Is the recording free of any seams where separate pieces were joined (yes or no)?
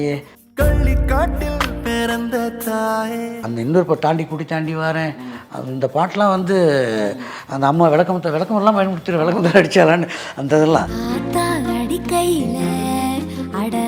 no